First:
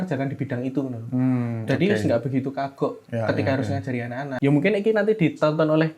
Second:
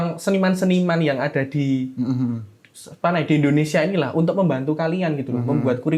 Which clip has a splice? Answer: first; 1 cut; at 4.3 s

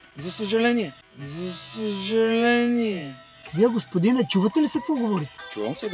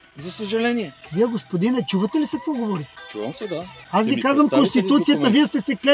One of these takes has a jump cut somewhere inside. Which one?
second; 2 cuts; at 1.0 s, 3.8 s

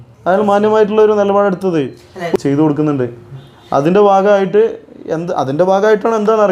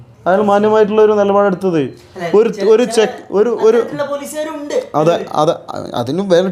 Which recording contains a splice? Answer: first; 1 cut; at 2.4 s

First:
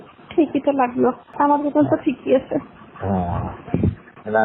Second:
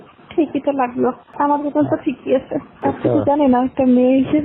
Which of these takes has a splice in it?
second; 1 cut; at 2.6 s

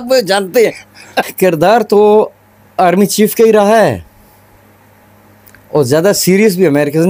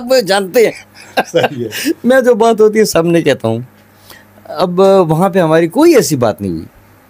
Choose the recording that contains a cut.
first; 1 cut; at 1.3 s

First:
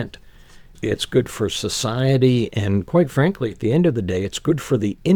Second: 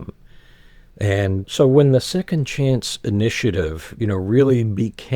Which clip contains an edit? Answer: second; 1 cut; at 1.4 s

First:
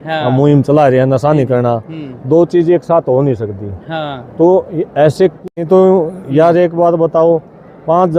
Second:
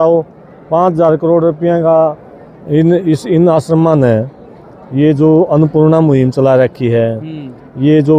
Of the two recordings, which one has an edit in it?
first; 1 cut; at 5.5 s

